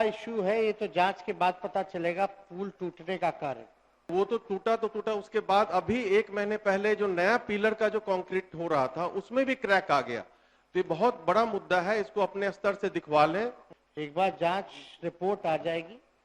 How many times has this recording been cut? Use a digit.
2